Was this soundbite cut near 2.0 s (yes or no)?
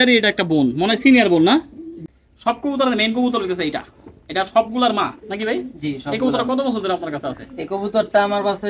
yes